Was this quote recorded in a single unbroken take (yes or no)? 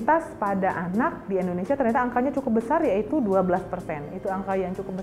yes